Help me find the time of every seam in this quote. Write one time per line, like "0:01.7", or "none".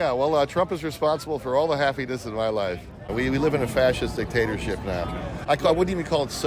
0:03.0